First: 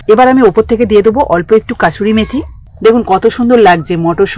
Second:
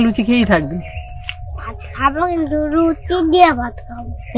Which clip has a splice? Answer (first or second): first